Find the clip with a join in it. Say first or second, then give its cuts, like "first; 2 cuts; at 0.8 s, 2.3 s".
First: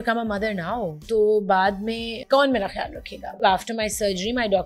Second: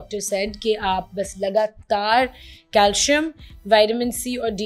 first; 3 cuts; at 1.0 s, 2.2 s, 3.3 s